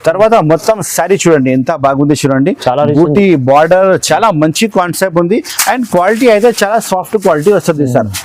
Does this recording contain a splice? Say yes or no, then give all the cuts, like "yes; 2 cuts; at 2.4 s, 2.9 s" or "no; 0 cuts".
no; 0 cuts